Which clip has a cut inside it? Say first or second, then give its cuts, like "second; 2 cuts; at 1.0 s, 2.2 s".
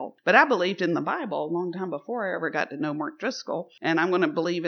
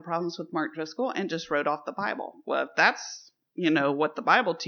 first; 1 cut; at 3.7 s